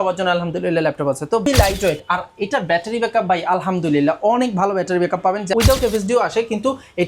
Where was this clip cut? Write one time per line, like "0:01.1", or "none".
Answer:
0:01.5
0:05.5